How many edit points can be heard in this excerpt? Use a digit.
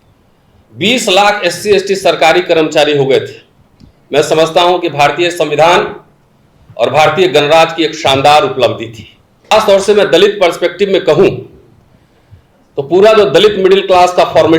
1